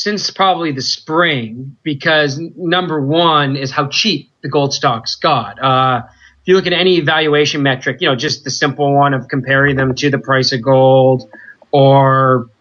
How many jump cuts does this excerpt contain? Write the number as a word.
zero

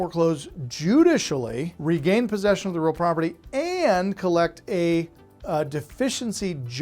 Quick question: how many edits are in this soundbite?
one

